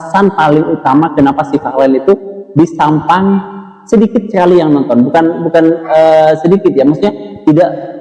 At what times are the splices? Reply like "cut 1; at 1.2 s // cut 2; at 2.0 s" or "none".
none